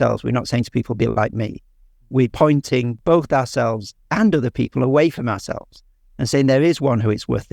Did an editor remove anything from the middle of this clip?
yes; 1 cut; at 2.6 s

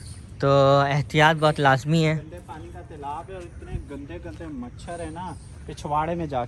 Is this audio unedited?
yes; 0 cuts

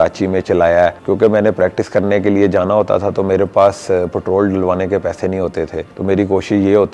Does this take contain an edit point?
no; 0 cuts

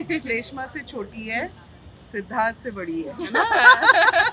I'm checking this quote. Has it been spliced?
no; 0 cuts

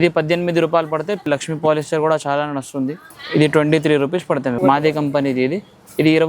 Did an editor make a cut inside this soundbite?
yes; 2 cuts; at 1.2 s, 4.6 s

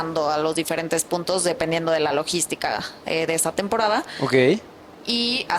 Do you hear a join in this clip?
no; 0 cuts

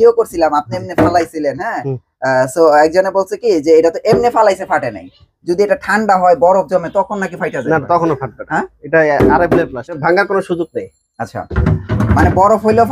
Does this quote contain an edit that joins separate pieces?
yes; 1 cut; at 10.0 s

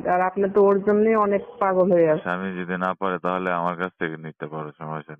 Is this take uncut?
no; 1 cut; at 2.2 s

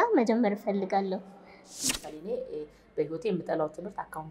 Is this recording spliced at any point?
yes; 1 cut; at 1.9 s

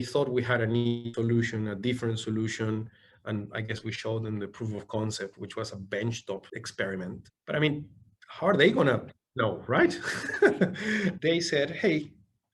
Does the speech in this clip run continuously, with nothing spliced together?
no; 2 cuts; at 6.6 s, 7.3 s

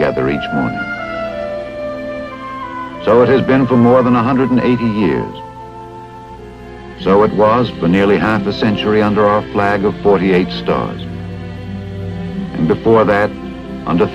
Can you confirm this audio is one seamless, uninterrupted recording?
no; 1 cut; at 6.0 s

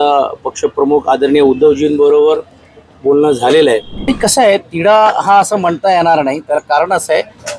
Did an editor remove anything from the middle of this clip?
yes; 1 cut; at 3.9 s

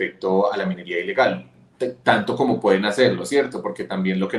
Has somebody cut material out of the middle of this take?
no; 0 cuts

